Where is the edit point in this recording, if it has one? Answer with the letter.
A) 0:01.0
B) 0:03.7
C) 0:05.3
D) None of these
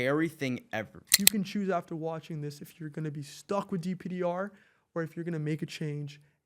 A